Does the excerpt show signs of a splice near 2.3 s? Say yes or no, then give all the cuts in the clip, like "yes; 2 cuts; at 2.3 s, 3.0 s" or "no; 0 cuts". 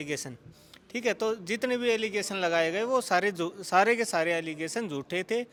no; 0 cuts